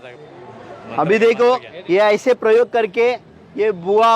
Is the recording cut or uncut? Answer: cut